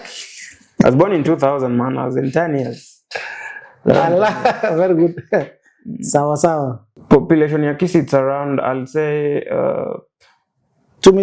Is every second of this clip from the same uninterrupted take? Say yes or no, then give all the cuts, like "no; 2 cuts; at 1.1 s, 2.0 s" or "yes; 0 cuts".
no; 1 cut; at 7.0 s